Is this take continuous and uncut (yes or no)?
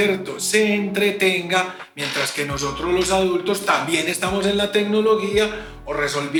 yes